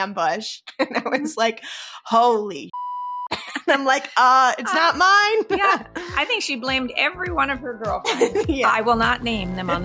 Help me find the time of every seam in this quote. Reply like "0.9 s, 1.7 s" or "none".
none